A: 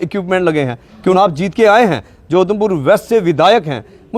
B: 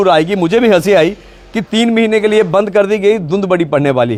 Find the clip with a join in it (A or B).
A